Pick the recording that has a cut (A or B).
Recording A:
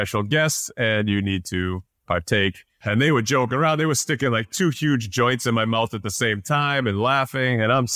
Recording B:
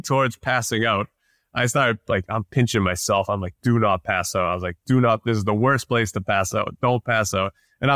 A